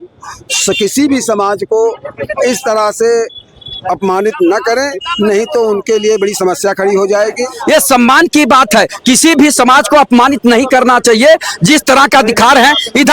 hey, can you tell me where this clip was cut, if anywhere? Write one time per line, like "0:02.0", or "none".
0:07.5